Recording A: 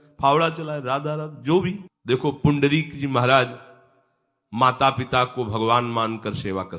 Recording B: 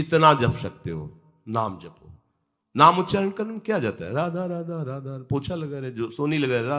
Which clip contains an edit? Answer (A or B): A